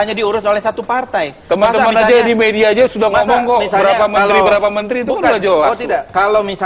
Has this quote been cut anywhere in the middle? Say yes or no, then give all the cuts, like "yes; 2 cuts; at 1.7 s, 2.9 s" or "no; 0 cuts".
no; 0 cuts